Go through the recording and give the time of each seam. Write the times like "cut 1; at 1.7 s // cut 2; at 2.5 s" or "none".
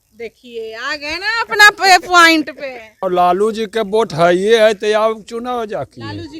cut 1; at 3.0 s